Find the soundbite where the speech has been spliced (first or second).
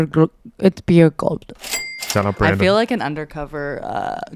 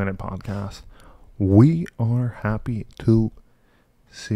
first